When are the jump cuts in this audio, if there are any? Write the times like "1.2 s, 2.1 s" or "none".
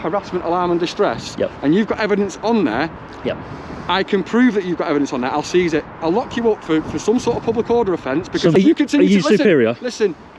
8.6 s